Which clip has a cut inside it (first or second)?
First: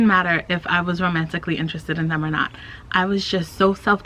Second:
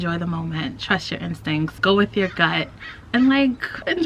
second